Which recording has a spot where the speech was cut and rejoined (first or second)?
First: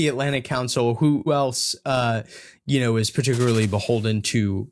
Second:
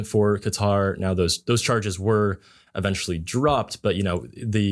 first